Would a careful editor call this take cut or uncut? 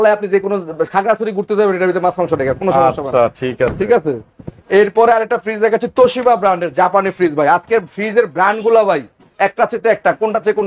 uncut